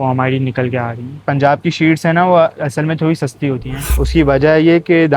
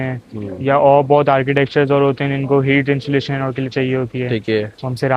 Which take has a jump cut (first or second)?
first